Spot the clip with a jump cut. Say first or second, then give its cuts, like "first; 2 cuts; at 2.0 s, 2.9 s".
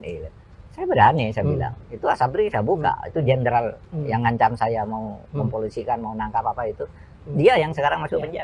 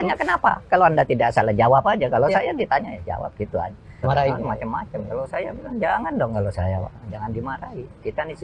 second; 1 cut; at 4.0 s